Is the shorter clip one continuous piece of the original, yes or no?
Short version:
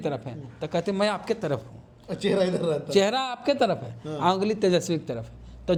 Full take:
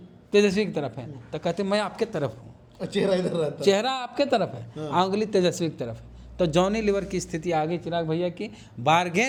yes